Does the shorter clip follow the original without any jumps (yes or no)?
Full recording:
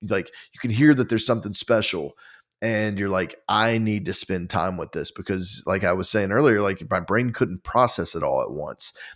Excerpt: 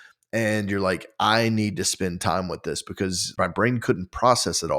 no